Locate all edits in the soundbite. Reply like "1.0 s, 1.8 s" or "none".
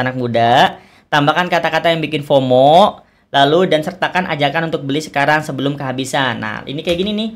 none